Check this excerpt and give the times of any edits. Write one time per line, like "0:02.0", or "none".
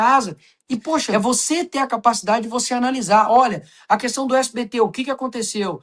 0:01.1